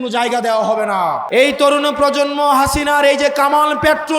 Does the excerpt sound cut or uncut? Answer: cut